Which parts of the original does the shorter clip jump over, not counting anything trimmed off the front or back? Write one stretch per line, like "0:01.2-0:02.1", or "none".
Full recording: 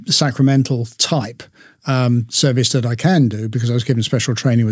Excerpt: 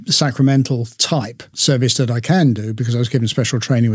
0:01.5-0:02.3